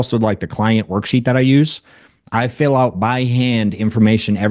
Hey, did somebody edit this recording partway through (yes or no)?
no